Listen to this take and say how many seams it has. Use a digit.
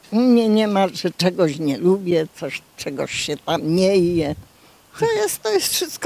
0